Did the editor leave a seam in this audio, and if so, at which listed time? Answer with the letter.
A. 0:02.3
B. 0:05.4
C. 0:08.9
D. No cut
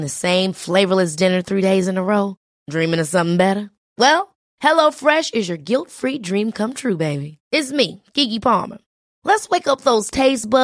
D